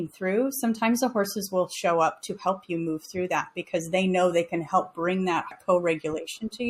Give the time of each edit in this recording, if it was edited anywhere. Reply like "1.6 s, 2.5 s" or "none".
5.5 s